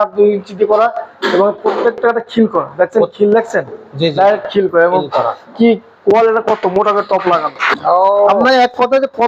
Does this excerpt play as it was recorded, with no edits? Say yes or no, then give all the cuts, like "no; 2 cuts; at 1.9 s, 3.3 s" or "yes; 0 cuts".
no; 1 cut; at 7.8 s